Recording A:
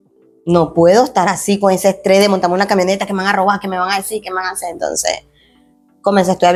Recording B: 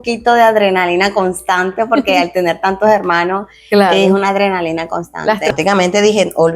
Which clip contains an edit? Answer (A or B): B